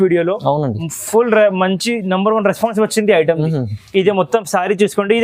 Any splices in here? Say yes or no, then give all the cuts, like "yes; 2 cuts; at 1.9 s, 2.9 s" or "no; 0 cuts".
no; 0 cuts